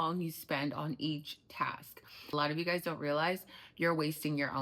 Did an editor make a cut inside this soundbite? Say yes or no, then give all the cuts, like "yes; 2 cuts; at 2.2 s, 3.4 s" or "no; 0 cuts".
yes; 1 cut; at 2.1 s